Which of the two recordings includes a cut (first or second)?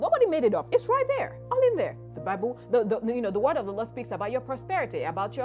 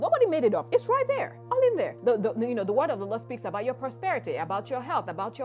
second